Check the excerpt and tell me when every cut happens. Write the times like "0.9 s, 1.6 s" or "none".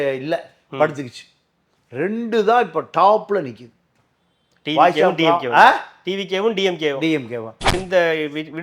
7.6 s